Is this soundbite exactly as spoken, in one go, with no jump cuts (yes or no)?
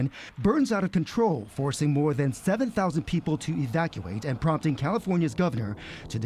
no